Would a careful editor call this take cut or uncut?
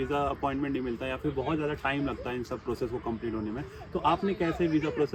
uncut